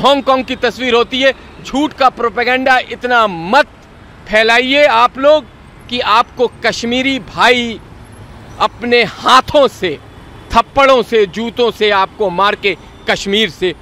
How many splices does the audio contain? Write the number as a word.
zero